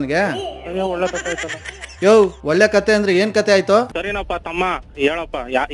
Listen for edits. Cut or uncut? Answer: cut